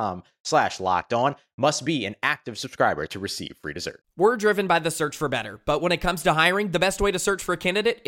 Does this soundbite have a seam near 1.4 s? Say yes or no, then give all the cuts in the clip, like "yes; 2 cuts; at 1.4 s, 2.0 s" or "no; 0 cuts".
no; 1 cut; at 4.0 s